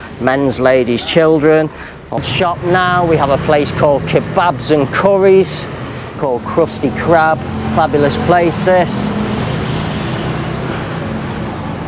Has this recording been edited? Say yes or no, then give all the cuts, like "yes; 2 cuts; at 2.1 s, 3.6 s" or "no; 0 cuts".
yes; 2 cuts; at 2.2 s, 6.1 s